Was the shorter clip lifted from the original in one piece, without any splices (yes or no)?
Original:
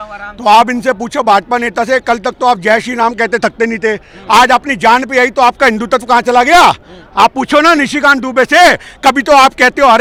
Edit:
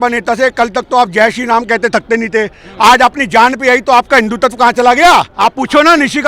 no